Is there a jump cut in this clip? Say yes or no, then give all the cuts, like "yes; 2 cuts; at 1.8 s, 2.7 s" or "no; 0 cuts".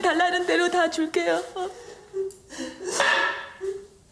no; 0 cuts